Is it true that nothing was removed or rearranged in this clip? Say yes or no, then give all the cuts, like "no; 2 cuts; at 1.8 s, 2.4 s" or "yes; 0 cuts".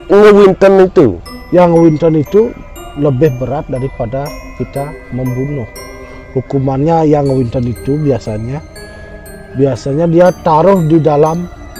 yes; 0 cuts